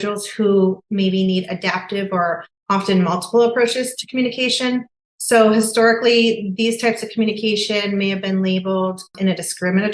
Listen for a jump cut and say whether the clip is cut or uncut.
uncut